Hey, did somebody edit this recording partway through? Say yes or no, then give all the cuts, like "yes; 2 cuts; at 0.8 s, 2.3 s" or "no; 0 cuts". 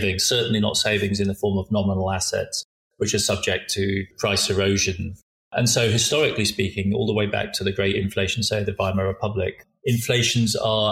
yes; 3 cuts; at 4.1 s, 5.5 s, 9.6 s